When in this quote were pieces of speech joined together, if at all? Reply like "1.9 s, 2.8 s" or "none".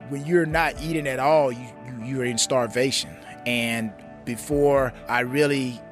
4.0 s, 5.0 s

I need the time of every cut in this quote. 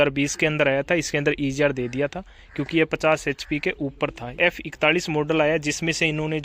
4.4 s

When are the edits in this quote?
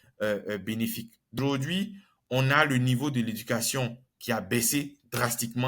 1.4 s

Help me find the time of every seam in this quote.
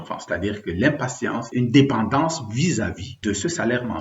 1.5 s, 3.1 s

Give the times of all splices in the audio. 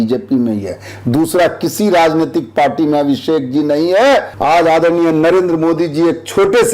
4.3 s

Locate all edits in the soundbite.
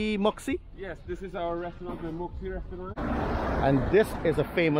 3.0 s

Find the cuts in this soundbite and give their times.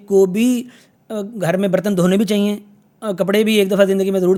none

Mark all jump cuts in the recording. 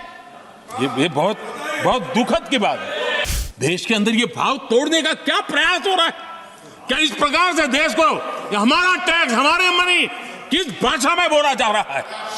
3.2 s

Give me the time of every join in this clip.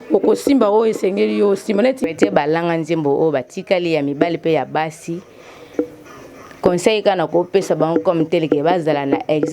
2.1 s

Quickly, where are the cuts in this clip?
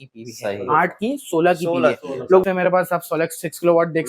2.4 s

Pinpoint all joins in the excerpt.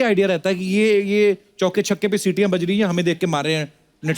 none

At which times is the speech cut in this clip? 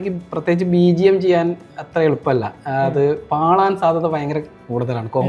none

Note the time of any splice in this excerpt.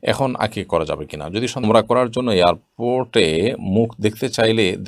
1.6 s

